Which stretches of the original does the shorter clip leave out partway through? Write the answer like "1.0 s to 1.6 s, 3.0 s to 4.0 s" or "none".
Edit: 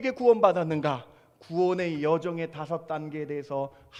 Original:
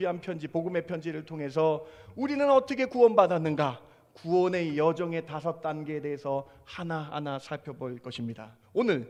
none